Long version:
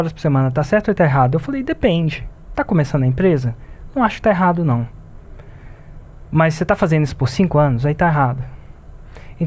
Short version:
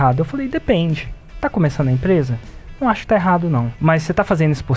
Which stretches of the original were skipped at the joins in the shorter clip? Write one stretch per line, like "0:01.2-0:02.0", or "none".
0:04.9-0:06.2